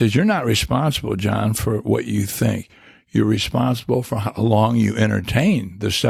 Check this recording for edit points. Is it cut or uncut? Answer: uncut